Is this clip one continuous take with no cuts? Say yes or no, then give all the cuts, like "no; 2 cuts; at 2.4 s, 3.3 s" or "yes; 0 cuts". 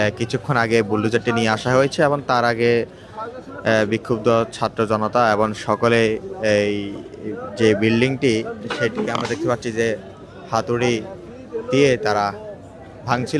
yes; 0 cuts